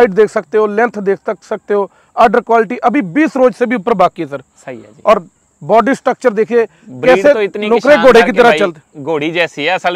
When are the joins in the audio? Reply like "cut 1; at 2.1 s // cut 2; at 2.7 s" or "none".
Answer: none